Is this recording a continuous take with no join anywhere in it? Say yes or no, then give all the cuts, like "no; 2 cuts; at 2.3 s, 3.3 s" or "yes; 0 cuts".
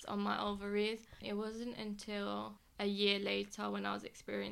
no; 2 cuts; at 1.0 s, 2.6 s